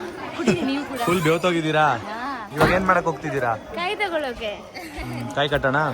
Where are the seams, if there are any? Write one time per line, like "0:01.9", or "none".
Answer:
0:02.5